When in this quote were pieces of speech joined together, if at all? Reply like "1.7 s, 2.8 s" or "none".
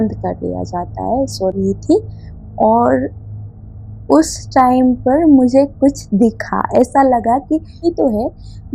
1.6 s, 7.8 s